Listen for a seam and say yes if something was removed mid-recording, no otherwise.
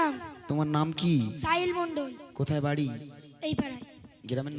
no